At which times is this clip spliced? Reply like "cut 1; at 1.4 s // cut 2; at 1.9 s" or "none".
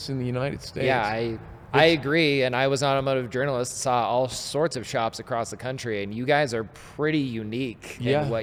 none